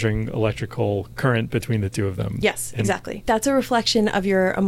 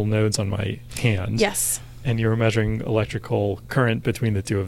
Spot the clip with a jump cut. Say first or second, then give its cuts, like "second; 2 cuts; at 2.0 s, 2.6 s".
first; 1 cut; at 3.1 s